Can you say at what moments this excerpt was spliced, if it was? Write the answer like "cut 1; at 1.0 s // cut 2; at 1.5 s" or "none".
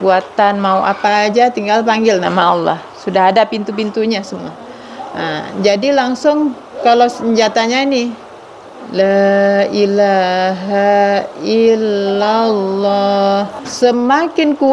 cut 1; at 13.6 s